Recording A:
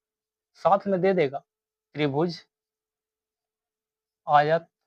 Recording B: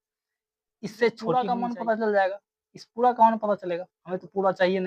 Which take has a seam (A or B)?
B